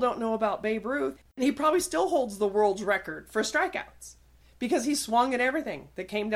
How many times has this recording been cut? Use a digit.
1